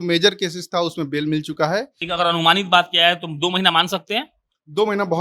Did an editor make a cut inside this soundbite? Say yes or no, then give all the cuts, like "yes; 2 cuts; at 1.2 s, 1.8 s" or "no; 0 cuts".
yes; 1 cut; at 2.0 s